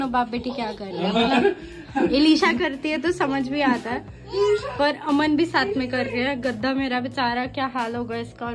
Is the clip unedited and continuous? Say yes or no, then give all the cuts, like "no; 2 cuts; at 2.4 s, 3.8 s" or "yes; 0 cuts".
yes; 0 cuts